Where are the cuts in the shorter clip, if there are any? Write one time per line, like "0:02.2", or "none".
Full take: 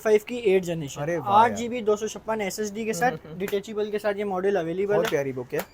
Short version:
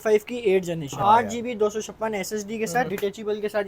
0:00.9
0:02.9

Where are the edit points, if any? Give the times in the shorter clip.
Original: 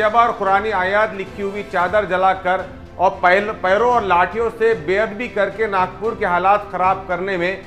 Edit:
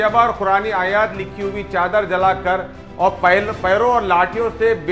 none

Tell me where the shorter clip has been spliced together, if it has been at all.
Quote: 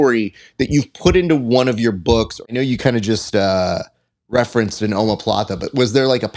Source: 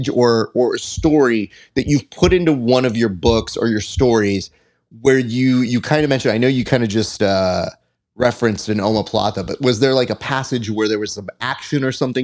0:02.5

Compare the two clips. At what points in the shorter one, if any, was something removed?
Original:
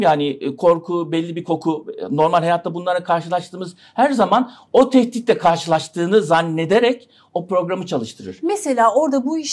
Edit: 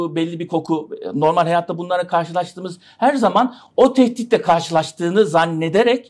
none

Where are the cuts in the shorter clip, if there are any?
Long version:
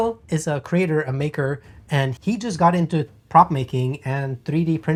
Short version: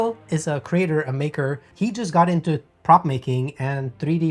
0:01.7

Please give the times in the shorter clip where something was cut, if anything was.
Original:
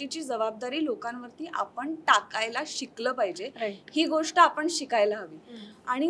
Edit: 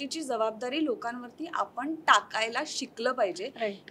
none

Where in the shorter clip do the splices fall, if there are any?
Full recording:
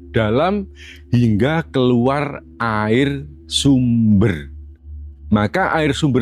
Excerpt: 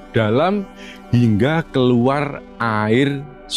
none

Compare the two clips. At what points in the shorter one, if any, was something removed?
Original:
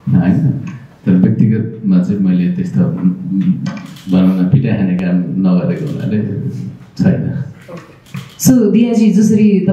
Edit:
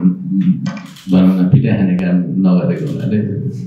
none

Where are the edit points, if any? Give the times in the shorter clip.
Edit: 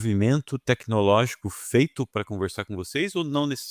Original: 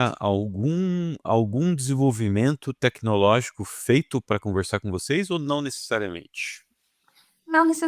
none

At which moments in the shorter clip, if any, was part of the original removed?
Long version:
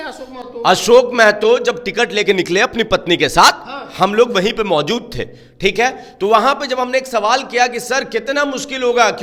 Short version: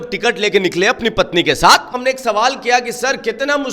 0:02.0

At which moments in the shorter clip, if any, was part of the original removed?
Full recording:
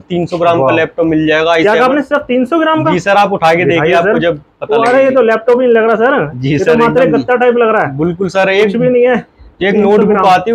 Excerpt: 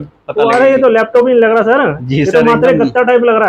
none

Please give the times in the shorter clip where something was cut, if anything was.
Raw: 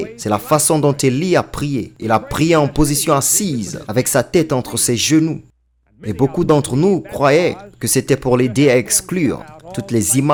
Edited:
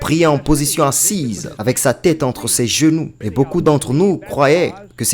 0:03.2

